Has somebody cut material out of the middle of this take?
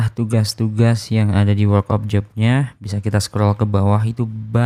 no; 0 cuts

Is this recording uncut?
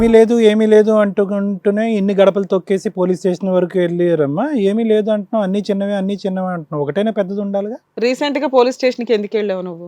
no; 1 cut; at 7.8 s

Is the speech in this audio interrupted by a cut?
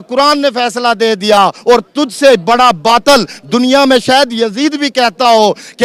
no; 0 cuts

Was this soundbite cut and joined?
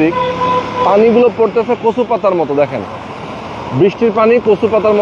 no; 0 cuts

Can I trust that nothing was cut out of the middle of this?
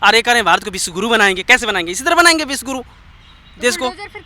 yes; 0 cuts

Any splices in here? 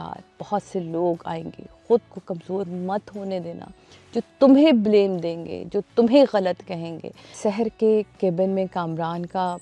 yes; 1 cut; at 7.4 s

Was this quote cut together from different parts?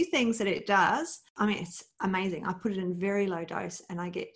yes; 1 cut; at 1.2 s

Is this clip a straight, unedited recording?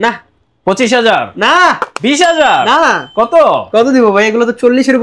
yes; 0 cuts

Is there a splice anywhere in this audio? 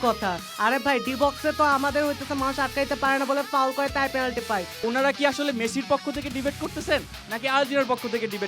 yes; 1 cut; at 4.7 s

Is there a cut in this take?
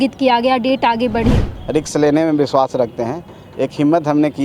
yes; 1 cut; at 1.5 s

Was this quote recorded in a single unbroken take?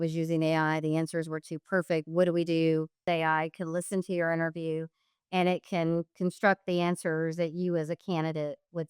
no; 1 cut; at 3.1 s

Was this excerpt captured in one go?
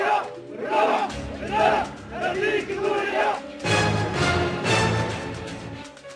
yes; 0 cuts

